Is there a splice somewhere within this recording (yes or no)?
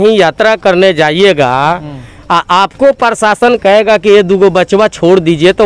no